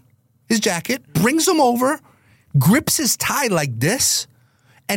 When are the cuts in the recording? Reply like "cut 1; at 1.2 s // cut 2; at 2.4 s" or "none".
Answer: cut 1; at 1.0 s